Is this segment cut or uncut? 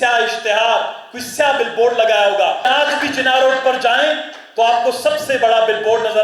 cut